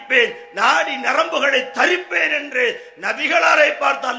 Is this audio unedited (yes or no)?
yes